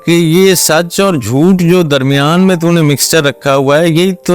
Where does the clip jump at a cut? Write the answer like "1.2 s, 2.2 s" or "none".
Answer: none